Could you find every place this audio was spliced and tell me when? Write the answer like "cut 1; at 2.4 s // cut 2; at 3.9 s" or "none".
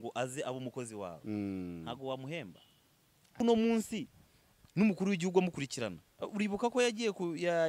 cut 1; at 3.4 s